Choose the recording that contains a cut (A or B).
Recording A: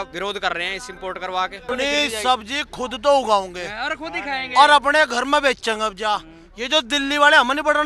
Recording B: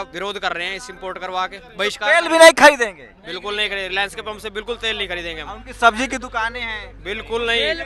A